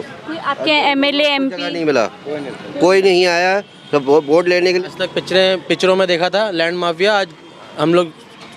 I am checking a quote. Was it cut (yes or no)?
yes